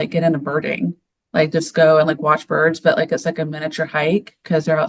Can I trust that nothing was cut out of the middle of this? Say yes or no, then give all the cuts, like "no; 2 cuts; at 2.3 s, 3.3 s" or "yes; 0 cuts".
yes; 0 cuts